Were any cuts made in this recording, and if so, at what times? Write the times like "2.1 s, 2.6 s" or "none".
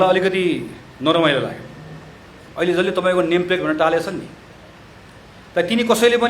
2.4 s

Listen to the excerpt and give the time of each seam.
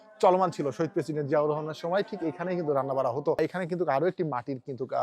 3.4 s

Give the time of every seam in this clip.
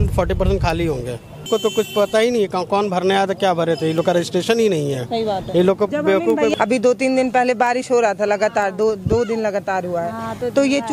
1.5 s, 6.5 s

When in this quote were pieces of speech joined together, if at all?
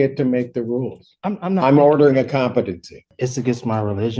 3.1 s

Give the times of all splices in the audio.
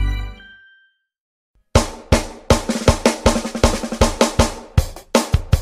1.5 s

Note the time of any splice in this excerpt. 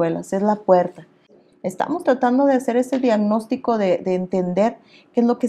1.4 s

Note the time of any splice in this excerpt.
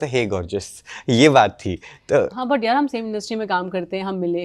none

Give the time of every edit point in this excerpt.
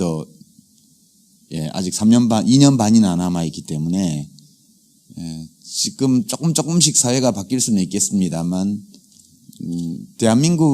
4.3 s

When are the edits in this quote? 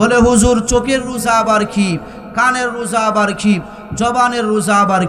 none

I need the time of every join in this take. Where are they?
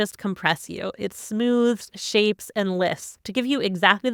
none

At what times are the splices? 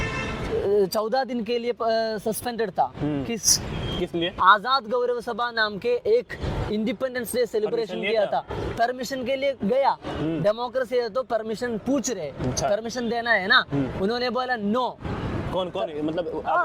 none

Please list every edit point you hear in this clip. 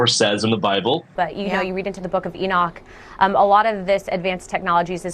1.1 s

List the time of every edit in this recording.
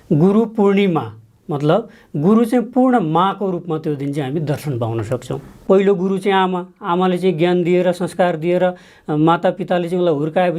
5.5 s

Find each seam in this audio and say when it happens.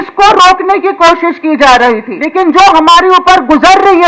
2.1 s

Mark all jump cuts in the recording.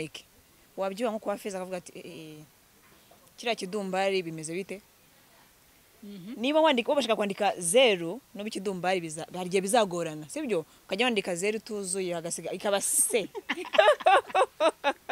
none

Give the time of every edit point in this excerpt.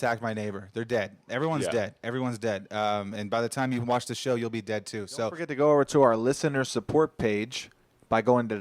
5.4 s

